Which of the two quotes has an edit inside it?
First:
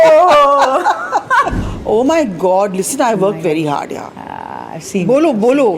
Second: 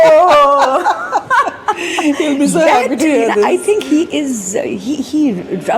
first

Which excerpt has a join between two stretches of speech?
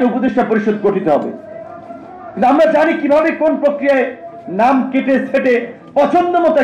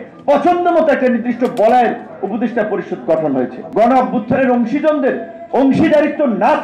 second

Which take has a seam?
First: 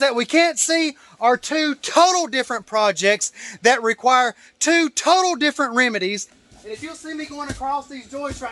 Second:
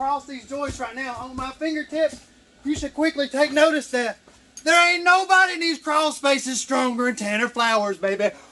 first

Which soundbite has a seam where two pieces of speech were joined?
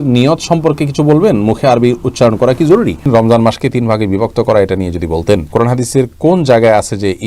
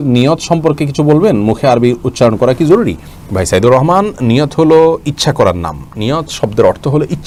first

